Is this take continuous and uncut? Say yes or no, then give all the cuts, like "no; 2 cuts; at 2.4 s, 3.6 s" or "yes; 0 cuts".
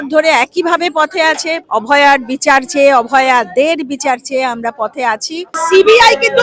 no; 2 cuts; at 1.6 s, 5.6 s